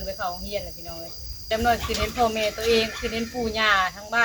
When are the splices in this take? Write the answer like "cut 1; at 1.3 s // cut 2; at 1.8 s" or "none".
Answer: cut 1; at 1.5 s